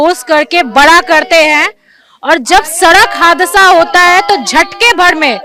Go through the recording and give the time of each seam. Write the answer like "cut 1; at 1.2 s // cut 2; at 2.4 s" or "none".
none